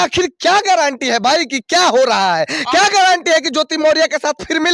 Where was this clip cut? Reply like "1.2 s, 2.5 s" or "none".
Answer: none